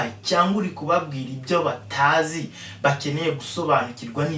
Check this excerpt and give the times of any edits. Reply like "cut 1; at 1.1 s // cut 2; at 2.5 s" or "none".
none